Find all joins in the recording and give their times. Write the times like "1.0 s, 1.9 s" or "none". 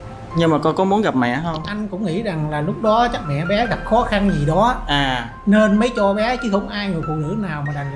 2.1 s